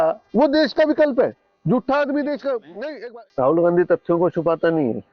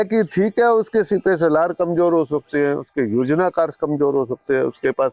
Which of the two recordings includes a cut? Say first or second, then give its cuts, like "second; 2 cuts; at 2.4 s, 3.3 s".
first; 1 cut; at 3.0 s